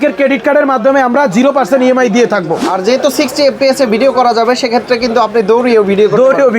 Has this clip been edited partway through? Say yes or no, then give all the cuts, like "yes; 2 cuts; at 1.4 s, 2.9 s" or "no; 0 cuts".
yes; 1 cut; at 2.6 s